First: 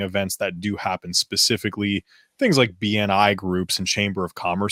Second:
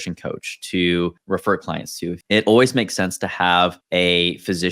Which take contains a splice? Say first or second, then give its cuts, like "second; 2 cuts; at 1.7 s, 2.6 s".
second; 3 cuts; at 1.2 s, 2.2 s, 3.8 s